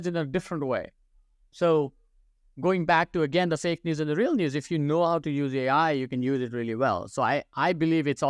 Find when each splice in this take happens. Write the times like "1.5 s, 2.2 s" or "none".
none